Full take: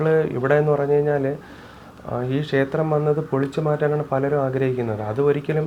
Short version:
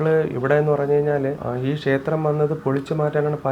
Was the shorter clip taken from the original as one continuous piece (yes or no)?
no